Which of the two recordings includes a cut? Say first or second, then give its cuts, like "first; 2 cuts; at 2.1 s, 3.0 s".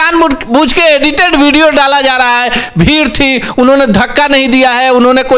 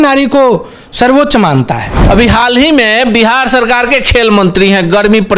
second; 1 cut; at 2.0 s